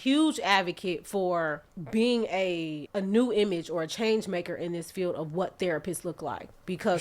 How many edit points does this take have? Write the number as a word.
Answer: two